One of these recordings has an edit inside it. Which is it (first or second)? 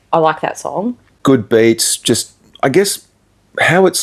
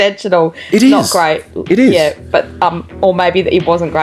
first